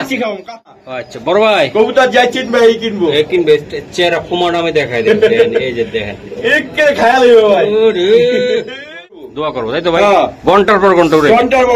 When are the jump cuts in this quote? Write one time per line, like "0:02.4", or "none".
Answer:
0:00.9
0:09.3